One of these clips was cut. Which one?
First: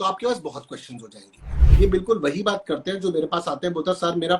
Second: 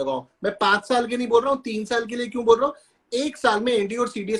first; 1 cut; at 1.5 s

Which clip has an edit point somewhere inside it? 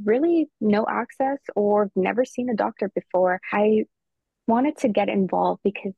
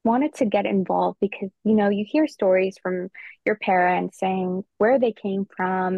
first; 1 cut; at 3.4 s

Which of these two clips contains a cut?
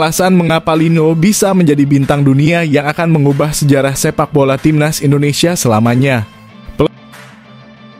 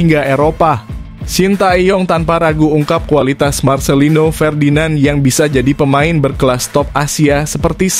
first; 1 cut; at 6.9 s

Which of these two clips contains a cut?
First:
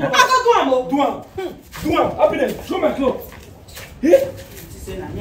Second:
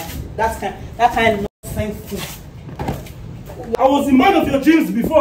second; 1 cut; at 3.8 s

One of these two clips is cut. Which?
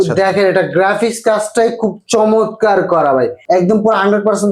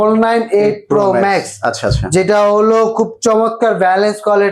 first; 1 cut; at 3.4 s

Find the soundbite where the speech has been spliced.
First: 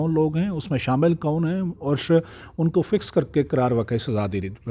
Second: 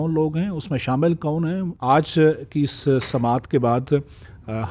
second; 1 cut; at 1.7 s

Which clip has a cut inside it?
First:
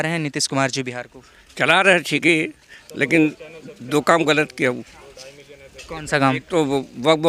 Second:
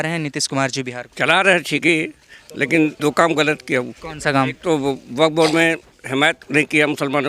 second; 4 cuts; at 1.0 s, 3.0 s, 4.0 s, 6.4 s

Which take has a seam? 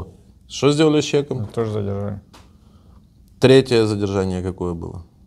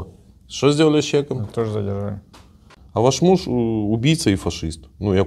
second; 1 cut; at 2.7 s

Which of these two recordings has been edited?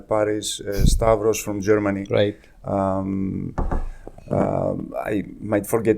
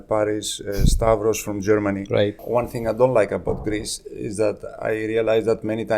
second; 1 cut; at 2.4 s

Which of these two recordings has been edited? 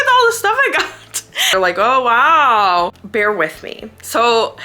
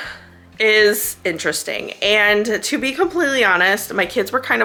first; 2 cuts; at 1.4 s, 3.0 s

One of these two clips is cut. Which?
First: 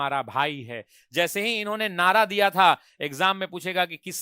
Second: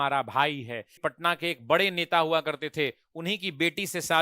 second; 1 cut; at 0.9 s

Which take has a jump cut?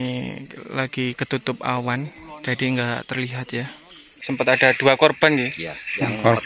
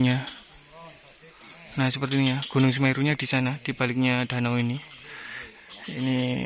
first; 1 cut; at 4.1 s

